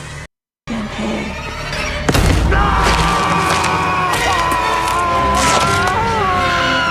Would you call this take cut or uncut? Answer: uncut